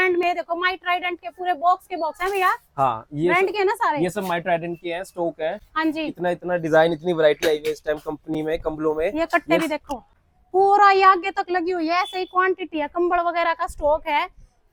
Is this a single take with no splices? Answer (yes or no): yes